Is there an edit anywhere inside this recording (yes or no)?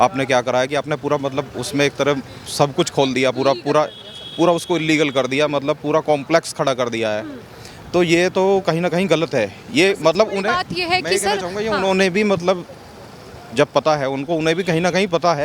no